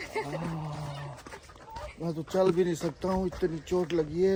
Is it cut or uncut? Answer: uncut